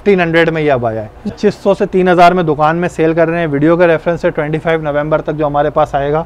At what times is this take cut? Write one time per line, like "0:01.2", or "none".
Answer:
0:01.3